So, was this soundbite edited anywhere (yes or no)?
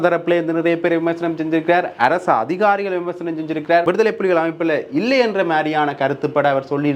yes